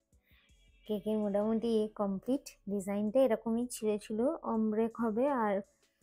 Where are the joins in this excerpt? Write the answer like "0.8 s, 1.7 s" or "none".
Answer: none

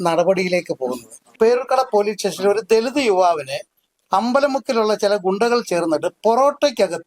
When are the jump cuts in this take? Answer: 1.3 s

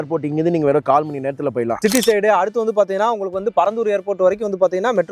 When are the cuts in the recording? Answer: 1.8 s

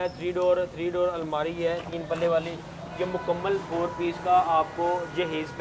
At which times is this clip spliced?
none

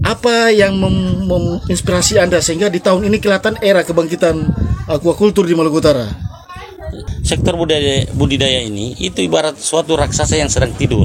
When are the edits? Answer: 7.1 s

